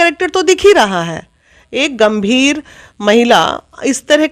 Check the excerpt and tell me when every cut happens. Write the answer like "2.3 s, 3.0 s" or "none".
none